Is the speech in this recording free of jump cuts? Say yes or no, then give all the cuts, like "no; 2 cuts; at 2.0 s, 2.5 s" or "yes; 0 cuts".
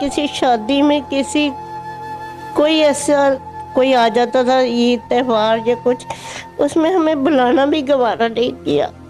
yes; 0 cuts